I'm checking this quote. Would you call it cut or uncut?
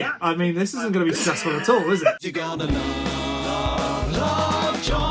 cut